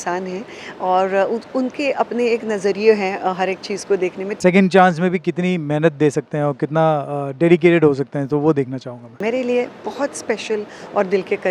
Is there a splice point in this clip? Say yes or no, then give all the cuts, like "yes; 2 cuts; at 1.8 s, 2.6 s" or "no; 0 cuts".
yes; 2 cuts; at 4.3 s, 9.2 s